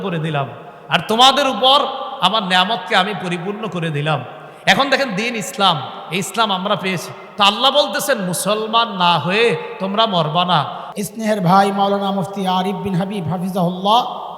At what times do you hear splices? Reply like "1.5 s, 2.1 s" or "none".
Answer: 10.8 s